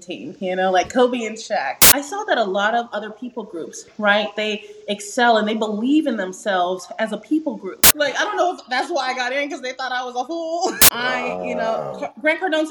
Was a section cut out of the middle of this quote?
yes; 3 cuts; at 1.8 s, 7.9 s, 10.9 s

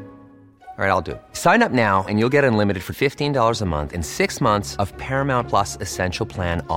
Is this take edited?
no; 0 cuts

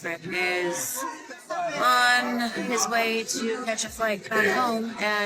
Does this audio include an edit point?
no; 0 cuts

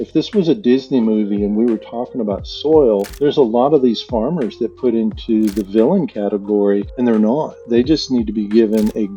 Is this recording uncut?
no; 2 cuts; at 3.1 s, 6.9 s

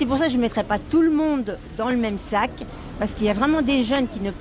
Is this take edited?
no; 0 cuts

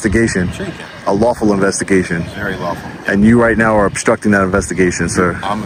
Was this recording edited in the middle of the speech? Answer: no; 0 cuts

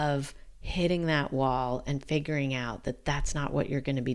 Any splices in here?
no; 0 cuts

